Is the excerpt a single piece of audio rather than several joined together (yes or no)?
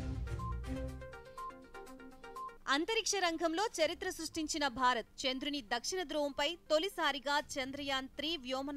no